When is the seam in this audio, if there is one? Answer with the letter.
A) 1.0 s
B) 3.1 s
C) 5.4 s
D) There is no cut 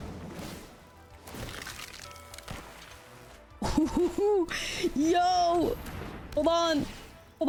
D